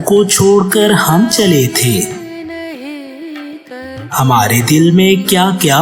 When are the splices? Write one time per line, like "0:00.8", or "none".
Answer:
0:02.0
0:03.8